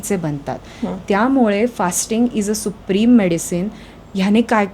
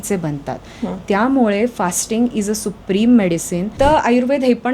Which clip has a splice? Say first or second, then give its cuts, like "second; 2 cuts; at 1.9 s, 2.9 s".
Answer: second; 1 cut; at 3.7 s